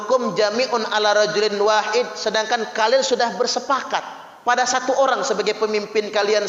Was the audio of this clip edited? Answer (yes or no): no